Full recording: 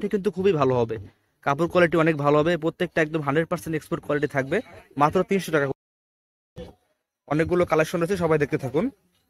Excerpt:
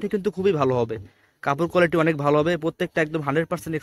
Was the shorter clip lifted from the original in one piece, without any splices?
yes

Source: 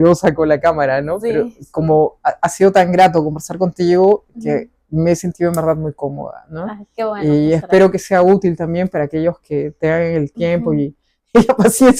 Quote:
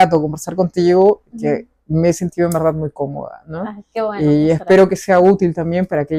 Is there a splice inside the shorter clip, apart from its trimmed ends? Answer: no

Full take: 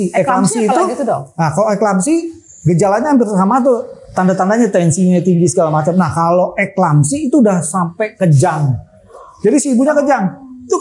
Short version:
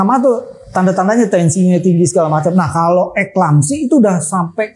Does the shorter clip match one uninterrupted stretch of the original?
yes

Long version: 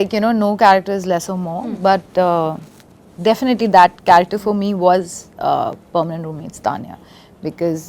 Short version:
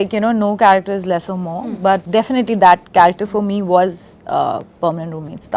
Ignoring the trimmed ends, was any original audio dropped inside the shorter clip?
yes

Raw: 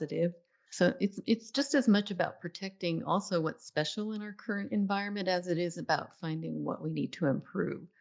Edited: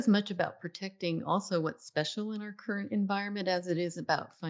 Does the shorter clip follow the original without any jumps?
yes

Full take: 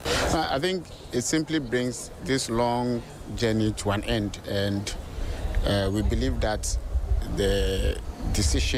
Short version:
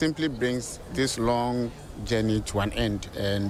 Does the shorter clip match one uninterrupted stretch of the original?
yes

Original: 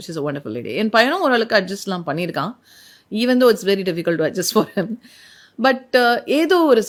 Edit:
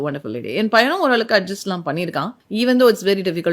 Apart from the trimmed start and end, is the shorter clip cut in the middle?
yes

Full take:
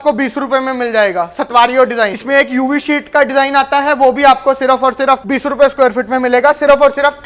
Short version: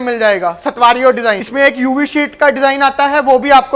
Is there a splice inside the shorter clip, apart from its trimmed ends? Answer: no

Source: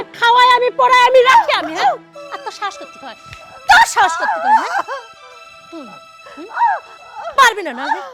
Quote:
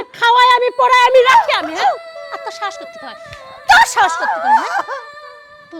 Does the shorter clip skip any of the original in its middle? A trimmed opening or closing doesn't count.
no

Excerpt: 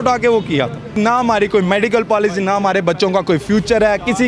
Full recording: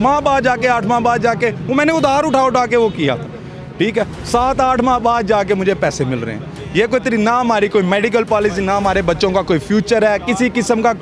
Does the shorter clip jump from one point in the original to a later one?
yes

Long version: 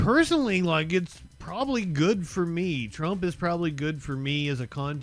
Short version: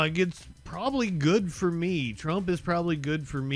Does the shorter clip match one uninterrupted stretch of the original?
yes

